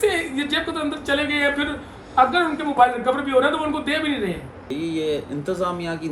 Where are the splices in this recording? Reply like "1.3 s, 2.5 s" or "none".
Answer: 4.7 s